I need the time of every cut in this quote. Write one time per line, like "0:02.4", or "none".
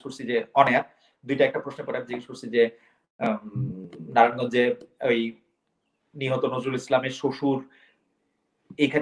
none